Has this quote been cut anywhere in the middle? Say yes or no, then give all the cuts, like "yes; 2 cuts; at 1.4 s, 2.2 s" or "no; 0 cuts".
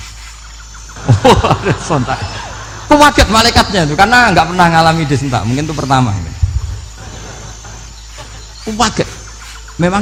no; 0 cuts